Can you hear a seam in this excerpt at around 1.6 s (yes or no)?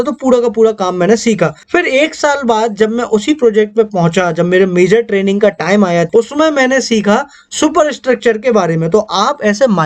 yes